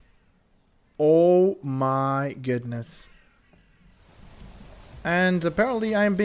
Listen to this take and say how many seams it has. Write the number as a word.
one